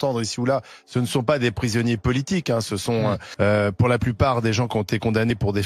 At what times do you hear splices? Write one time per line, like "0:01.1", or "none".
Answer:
none